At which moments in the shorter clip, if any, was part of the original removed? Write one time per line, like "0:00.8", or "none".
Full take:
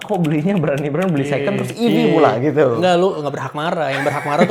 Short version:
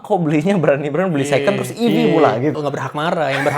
0:02.5